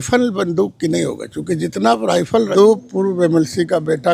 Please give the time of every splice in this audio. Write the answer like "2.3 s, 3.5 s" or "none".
2.5 s